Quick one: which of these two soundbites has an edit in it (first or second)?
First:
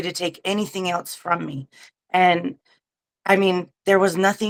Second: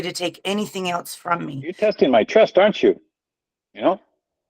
second